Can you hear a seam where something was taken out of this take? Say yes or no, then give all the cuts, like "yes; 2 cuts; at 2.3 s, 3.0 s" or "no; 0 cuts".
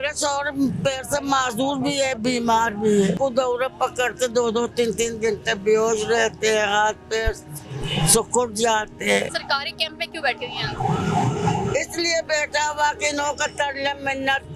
yes; 2 cuts; at 3.2 s, 9.4 s